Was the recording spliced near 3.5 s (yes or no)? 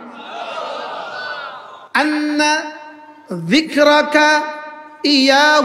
no